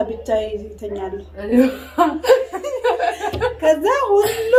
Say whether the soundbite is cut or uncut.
uncut